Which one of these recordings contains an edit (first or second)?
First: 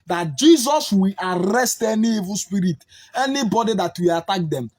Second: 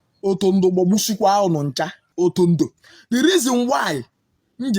second